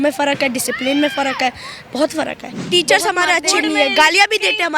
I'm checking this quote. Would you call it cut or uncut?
cut